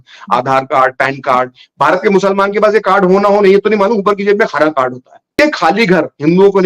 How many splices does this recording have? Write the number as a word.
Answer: one